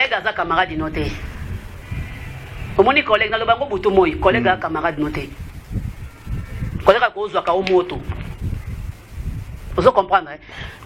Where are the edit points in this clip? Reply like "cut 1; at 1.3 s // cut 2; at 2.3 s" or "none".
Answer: none